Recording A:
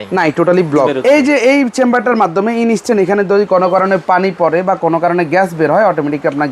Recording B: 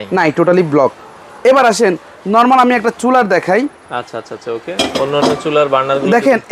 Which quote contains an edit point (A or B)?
A